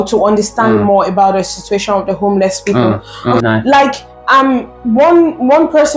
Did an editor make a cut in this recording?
yes; 1 cut; at 3.4 s

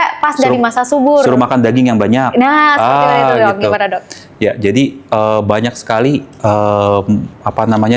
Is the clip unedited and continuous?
yes; 0 cuts

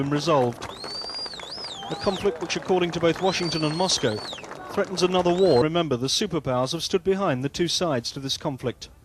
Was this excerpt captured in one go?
yes; 0 cuts

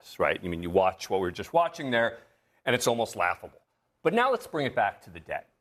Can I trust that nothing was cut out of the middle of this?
yes; 0 cuts

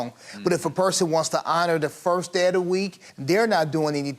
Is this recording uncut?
no; 1 cut; at 3.0 s

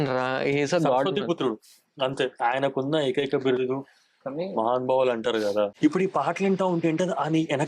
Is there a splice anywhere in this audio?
yes; 1 cut; at 5.7 s

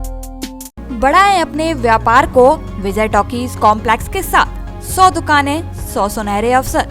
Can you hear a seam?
no; 0 cuts

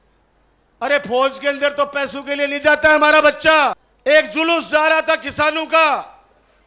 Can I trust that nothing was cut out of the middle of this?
no; 1 cut; at 3.9 s

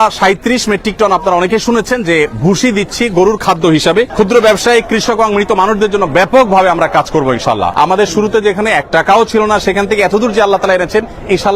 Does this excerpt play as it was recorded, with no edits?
no; 2 cuts; at 4.1 s, 7.7 s

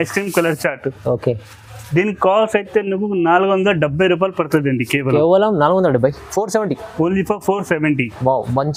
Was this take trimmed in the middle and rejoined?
no; 0 cuts

